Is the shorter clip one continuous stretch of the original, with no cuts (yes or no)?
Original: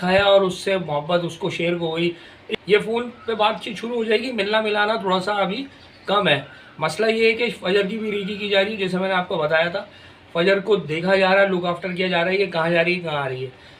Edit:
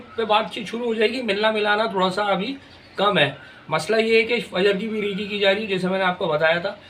yes